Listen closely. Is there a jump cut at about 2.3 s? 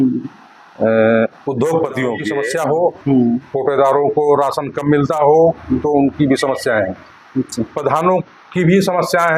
yes; 1 cut; at 2.3 s

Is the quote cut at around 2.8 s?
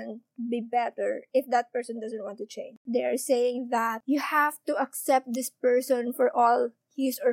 yes; 1 cut; at 2.8 s

